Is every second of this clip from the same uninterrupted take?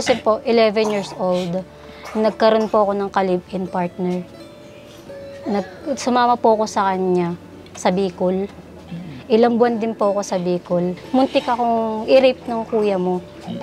no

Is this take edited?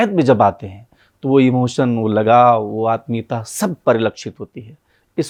no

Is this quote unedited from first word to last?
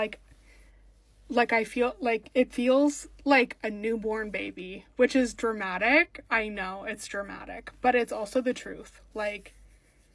yes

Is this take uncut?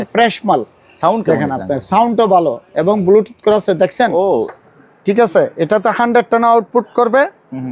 no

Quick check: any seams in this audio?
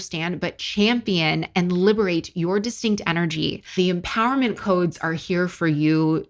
no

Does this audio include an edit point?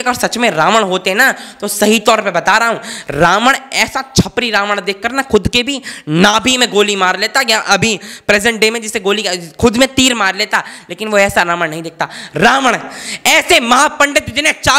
no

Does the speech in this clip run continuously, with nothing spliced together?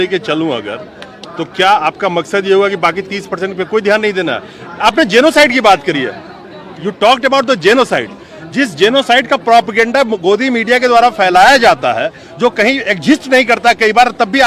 yes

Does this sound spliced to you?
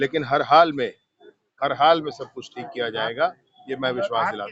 no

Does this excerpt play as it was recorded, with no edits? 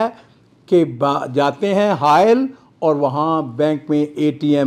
yes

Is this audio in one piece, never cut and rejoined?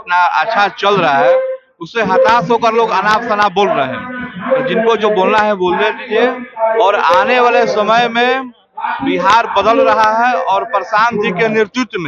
yes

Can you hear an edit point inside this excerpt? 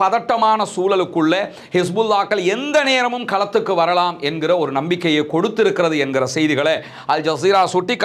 no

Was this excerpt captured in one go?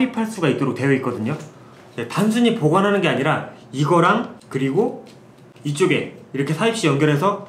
yes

